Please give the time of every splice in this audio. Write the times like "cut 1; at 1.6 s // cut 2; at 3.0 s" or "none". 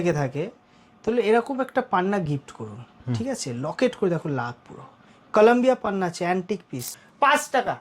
cut 1; at 6.9 s